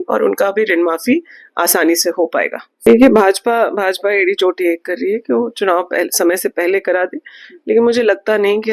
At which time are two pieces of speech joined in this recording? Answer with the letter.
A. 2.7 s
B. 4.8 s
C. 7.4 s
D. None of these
A